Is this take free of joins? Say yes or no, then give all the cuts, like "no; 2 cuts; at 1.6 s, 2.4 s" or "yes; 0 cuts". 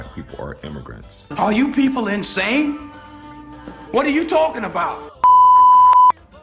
yes; 0 cuts